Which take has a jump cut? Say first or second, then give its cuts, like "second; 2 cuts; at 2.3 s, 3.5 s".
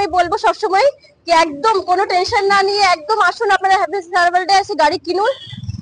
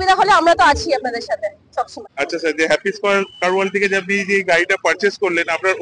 second; 1 cut; at 2.0 s